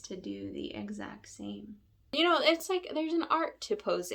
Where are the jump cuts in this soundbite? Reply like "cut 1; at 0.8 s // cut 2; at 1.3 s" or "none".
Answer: cut 1; at 2.1 s